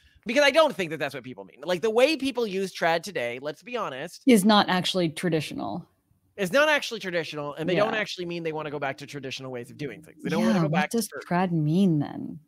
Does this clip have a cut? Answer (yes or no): no